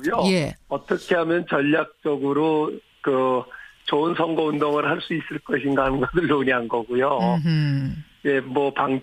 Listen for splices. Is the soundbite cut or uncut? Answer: cut